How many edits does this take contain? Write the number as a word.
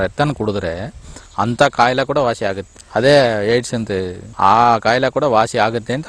two